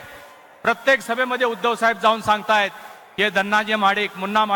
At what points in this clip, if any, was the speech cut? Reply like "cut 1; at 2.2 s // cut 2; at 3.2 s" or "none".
none